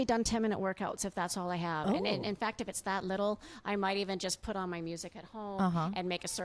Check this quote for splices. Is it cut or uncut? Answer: uncut